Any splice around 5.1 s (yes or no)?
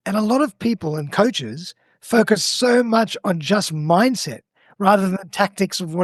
no